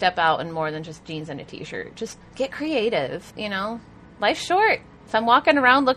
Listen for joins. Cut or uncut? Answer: cut